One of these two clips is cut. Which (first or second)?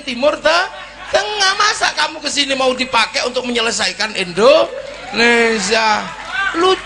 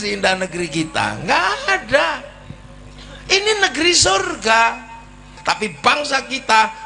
second